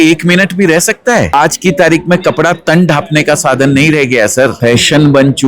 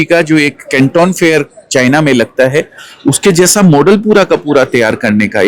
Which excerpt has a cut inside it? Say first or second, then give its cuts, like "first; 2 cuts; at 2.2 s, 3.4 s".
first; 2 cuts; at 1.3 s, 4.5 s